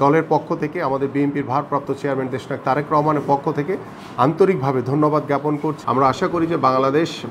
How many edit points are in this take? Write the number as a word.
one